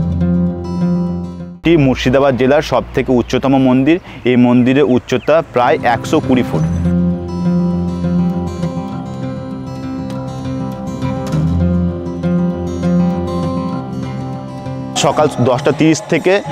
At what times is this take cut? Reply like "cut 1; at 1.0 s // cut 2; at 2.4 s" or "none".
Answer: cut 1; at 1.5 s // cut 2; at 6.5 s // cut 3; at 14.9 s